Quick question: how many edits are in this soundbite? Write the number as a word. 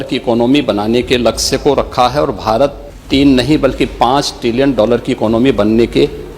one